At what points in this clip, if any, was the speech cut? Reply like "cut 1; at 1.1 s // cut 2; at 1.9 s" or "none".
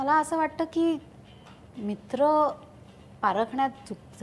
none